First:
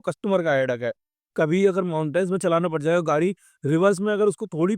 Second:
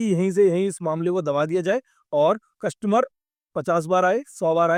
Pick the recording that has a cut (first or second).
first